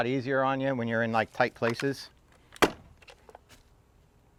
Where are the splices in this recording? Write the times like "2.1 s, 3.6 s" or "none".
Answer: none